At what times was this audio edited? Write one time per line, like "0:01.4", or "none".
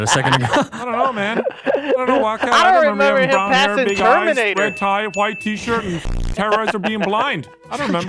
none